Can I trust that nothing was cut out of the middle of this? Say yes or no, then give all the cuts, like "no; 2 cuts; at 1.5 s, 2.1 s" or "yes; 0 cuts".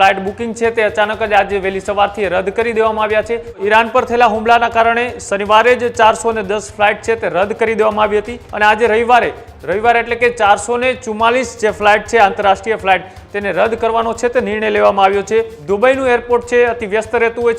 no; 3 cuts; at 3.6 s, 8.4 s, 15.6 s